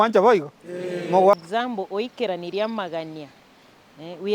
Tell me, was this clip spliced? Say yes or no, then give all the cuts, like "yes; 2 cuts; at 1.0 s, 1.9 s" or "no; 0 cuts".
yes; 1 cut; at 1.3 s